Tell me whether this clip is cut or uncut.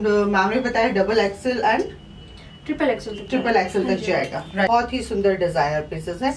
cut